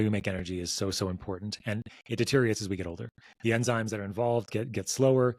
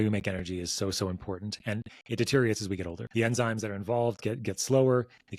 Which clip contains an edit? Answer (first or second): second